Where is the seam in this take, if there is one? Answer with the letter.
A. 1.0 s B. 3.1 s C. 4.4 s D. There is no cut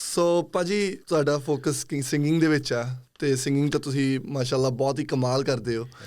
A